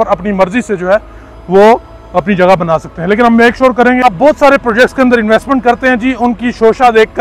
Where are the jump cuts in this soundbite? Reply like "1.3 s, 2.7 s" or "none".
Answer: 4.0 s